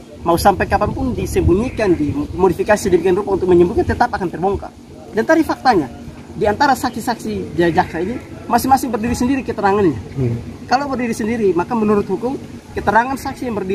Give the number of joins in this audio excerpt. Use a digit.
1